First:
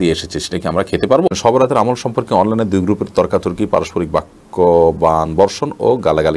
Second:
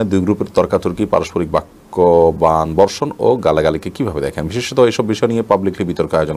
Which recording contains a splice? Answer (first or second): first